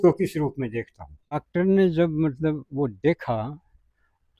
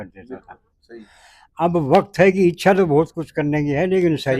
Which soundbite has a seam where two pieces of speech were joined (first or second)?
first